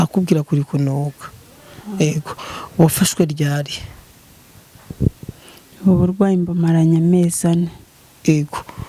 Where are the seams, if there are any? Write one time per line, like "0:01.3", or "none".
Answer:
none